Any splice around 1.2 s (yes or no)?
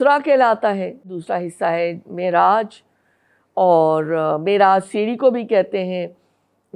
yes